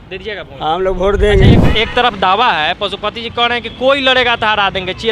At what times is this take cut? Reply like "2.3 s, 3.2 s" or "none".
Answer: 1.5 s